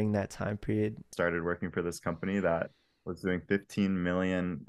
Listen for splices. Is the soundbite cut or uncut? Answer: cut